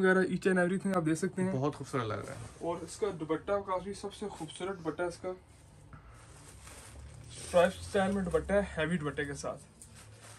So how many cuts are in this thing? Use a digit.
0